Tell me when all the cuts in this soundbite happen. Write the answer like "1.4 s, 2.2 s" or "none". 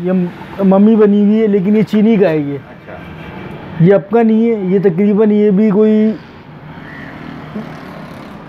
none